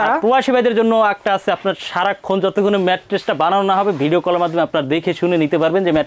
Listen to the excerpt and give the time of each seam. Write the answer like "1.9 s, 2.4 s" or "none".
none